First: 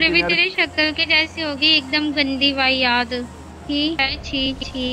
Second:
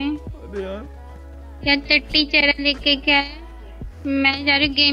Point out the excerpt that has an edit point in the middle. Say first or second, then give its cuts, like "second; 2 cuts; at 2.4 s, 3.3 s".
first; 1 cut; at 4.0 s